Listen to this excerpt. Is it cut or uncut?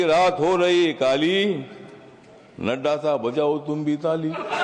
uncut